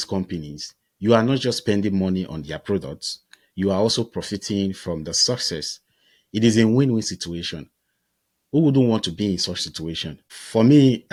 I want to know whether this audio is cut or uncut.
uncut